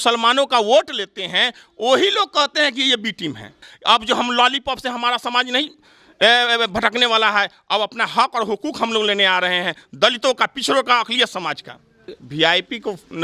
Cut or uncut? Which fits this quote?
cut